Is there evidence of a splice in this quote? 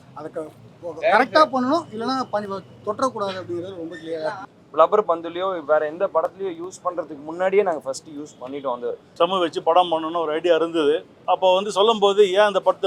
yes; 3 cuts; at 4.4 s, 9.0 s, 11.1 s

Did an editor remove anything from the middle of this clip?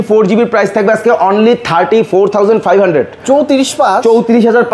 no; 0 cuts

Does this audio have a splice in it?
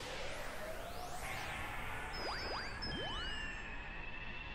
no; 0 cuts

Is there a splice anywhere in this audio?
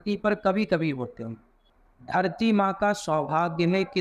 yes; 1 cut; at 1.6 s

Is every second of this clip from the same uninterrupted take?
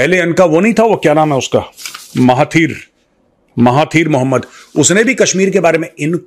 yes; 0 cuts

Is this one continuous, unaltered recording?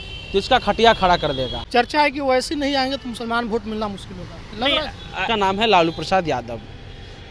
no; 2 cuts; at 1.5 s, 5.2 s

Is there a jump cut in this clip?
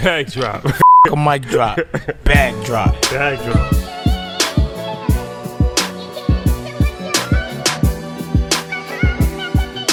no; 0 cuts

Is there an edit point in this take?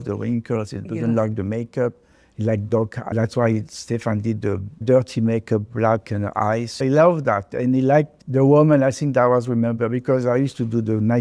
yes; 3 cuts; at 4.8 s, 6.8 s, 8.1 s

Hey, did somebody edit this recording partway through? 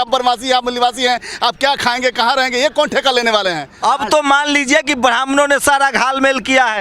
yes; 1 cut; at 3.7 s

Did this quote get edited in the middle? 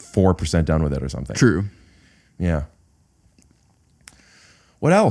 no; 0 cuts

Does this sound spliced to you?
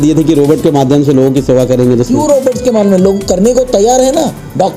no; 0 cuts

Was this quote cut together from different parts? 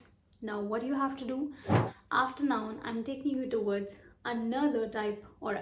yes; 1 cut; at 1.7 s

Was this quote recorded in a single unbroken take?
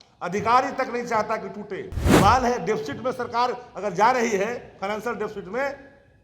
no; 1 cut; at 2.0 s

